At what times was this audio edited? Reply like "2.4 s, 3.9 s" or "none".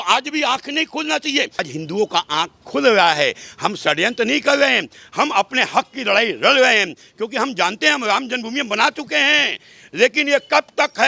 1.7 s